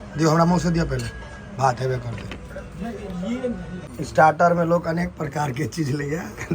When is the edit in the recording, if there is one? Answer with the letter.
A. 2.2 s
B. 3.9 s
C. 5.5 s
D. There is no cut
B